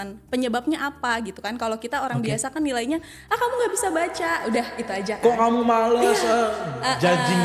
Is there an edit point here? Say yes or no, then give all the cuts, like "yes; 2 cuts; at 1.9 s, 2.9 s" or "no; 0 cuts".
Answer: no; 0 cuts